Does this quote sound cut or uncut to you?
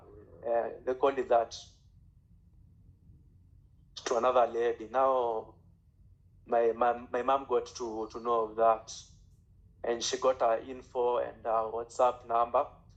uncut